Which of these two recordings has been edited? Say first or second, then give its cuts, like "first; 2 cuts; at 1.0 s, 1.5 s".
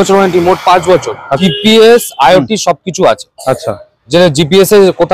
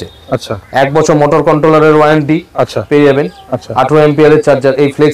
first; 1 cut; at 1.3 s